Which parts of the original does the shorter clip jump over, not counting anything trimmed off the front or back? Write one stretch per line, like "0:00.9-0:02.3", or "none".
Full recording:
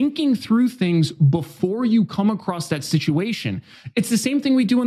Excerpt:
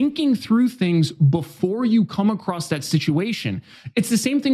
none